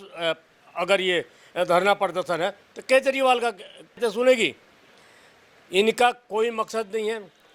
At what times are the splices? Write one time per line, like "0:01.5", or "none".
0:04.0